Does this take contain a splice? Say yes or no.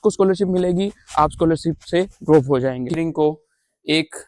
yes